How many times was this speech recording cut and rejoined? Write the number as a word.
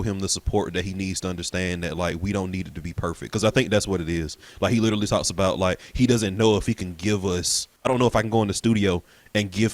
one